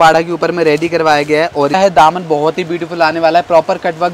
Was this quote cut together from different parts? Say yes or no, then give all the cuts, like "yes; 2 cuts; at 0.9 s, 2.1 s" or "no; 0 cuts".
yes; 1 cut; at 1.8 s